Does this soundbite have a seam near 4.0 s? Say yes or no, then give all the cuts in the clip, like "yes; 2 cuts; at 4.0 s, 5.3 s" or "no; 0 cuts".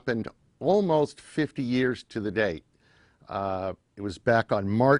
no; 1 cut; at 2.1 s